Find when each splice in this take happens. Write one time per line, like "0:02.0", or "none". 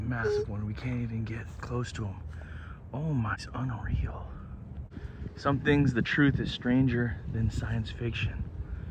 0:03.4
0:04.9